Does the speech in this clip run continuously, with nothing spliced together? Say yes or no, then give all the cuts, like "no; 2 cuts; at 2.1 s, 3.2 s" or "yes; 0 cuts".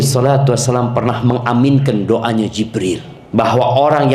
no; 1 cut; at 3.1 s